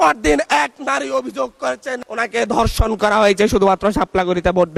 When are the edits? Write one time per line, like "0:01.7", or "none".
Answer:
none